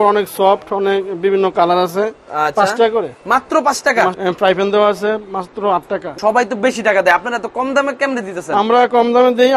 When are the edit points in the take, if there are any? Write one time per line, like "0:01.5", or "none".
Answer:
0:04.2
0:06.1